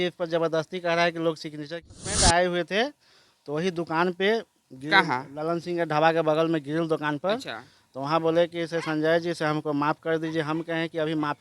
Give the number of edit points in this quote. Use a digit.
1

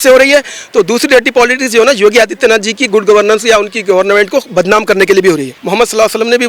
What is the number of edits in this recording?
1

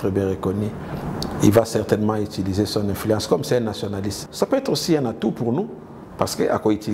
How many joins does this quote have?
1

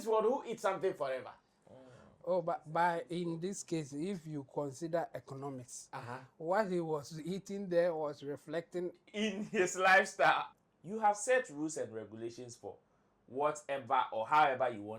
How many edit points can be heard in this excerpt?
1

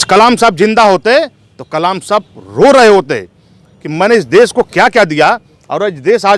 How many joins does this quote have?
0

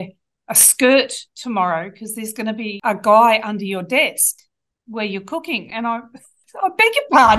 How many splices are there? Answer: 2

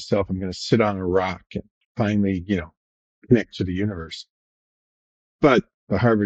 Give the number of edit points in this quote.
0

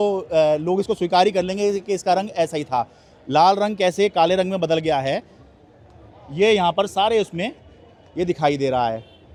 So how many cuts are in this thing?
0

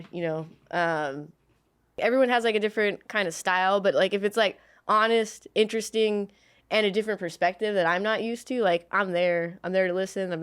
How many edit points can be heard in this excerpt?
1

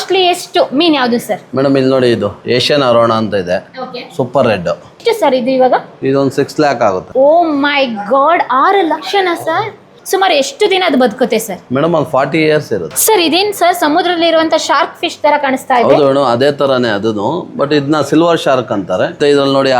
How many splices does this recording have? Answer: 3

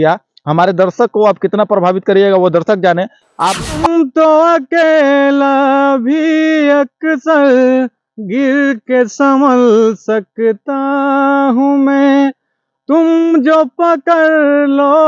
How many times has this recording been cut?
1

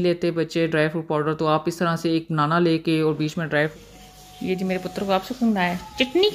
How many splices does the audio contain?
1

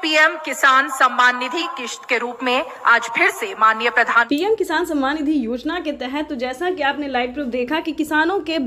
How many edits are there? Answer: 1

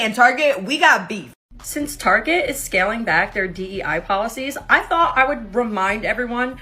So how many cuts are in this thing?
1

